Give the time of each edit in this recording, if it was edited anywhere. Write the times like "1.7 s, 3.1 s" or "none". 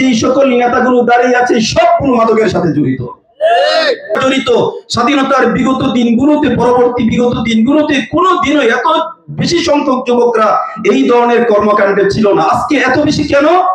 4.1 s